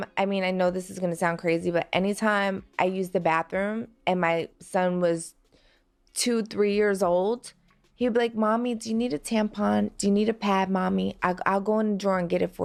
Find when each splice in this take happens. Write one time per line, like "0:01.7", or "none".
none